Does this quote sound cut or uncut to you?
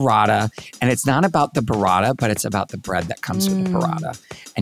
uncut